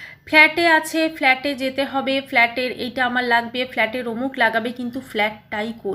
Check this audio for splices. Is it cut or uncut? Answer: uncut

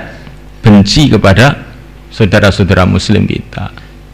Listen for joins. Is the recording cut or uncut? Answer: uncut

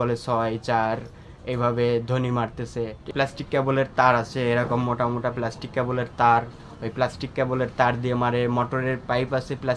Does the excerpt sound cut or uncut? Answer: cut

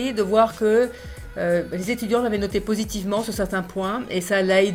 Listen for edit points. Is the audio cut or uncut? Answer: uncut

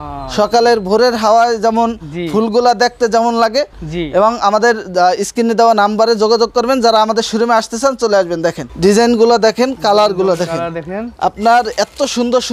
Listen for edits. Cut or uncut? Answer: cut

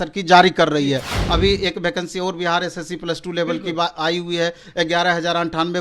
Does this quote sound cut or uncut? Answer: cut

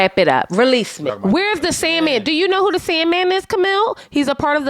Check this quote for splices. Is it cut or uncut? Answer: cut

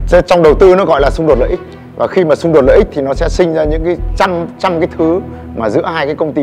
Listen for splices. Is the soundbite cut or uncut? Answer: uncut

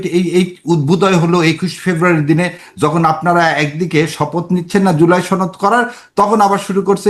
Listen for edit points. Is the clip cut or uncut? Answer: uncut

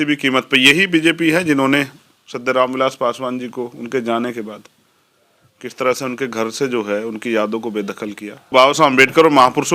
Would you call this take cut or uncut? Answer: cut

